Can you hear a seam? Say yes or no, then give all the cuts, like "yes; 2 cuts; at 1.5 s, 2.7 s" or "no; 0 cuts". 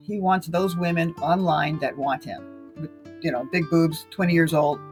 no; 0 cuts